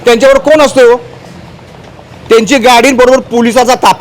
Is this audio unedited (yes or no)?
yes